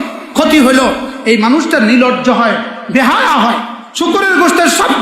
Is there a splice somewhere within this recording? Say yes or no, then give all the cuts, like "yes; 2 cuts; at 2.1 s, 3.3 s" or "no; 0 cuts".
yes; 1 cut; at 3.8 s